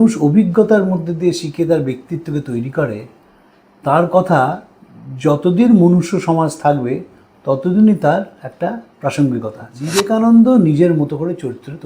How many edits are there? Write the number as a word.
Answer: one